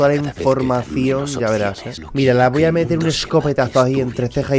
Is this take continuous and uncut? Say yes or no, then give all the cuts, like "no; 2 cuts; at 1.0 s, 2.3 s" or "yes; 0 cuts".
no; 1 cut; at 1.9 s